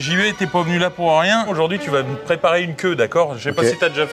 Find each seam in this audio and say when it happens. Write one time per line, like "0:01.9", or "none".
0:01.5